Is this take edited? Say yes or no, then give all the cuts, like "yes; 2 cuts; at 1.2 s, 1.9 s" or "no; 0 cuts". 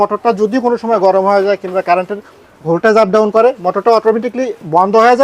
no; 0 cuts